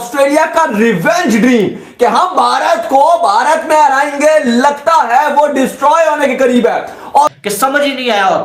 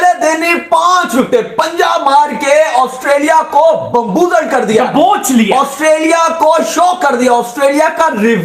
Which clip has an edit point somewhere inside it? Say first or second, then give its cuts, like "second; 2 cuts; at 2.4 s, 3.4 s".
first; 1 cut; at 7.4 s